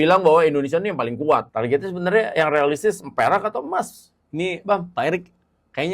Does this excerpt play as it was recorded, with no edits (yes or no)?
no